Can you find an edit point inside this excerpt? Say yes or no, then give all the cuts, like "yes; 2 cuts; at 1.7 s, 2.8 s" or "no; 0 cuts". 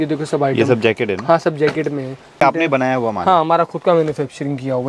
yes; 1 cut; at 2.4 s